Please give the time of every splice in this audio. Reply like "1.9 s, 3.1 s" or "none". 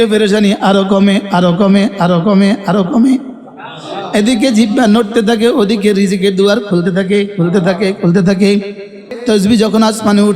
9.1 s

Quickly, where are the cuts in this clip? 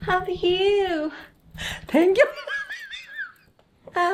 none

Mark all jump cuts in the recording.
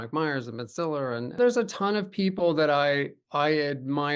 1.4 s

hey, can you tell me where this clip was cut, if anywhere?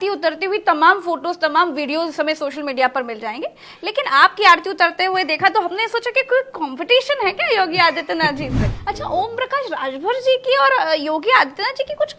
8.7 s

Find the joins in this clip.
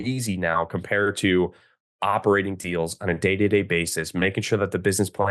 none

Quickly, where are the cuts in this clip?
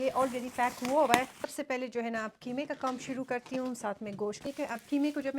1.4 s, 4.4 s

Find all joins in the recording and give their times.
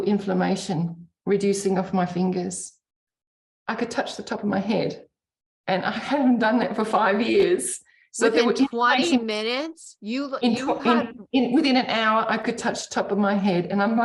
none

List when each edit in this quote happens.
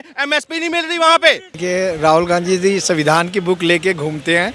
1.5 s

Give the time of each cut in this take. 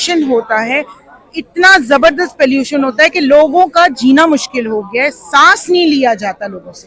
none

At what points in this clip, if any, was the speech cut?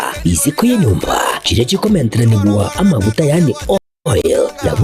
none

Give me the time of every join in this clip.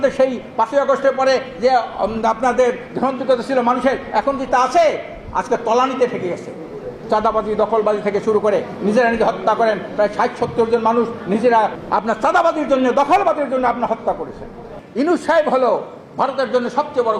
11.8 s, 14.8 s

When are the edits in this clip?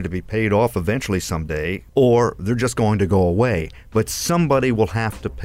1.8 s

